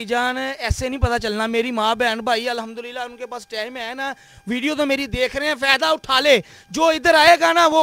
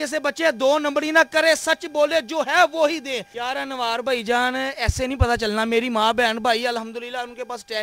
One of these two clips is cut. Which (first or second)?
second